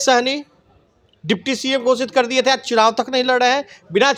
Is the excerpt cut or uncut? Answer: uncut